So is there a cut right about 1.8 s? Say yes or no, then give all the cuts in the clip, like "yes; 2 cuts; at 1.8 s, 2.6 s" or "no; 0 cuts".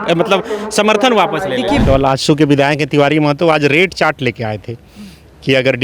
yes; 1 cut; at 1.8 s